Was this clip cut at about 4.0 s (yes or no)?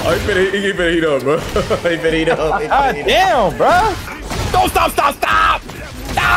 yes